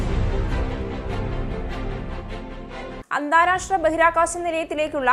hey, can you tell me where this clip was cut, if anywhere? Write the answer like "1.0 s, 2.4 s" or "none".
none